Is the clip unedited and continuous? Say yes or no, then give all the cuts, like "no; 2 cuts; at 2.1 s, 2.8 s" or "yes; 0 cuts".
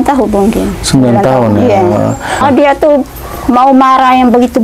no; 1 cut; at 2.4 s